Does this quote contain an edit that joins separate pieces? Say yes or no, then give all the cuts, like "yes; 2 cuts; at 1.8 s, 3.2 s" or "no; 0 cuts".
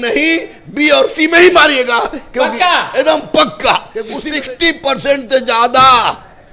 yes; 1 cut; at 4.2 s